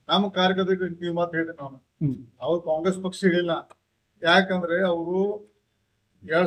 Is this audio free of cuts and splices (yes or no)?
yes